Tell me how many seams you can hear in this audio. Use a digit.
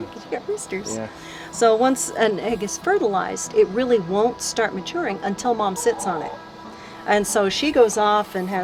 0